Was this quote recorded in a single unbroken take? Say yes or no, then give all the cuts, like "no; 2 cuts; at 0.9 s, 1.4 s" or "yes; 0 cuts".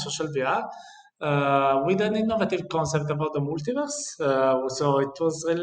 yes; 0 cuts